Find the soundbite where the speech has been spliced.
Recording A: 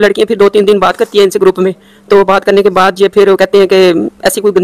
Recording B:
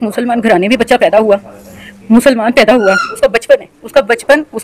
B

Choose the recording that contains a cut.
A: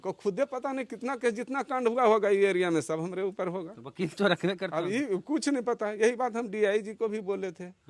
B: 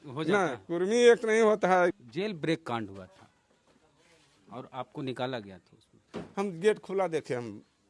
B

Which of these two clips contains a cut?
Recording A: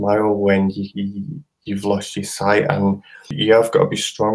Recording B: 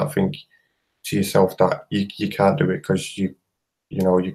A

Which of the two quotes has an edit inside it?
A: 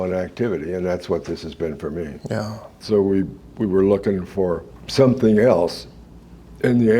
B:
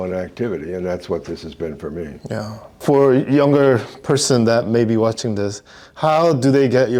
A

